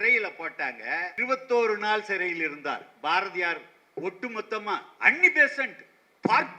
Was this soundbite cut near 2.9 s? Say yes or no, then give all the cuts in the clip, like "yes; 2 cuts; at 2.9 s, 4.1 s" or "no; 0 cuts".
no; 2 cuts; at 1.1 s, 4.9 s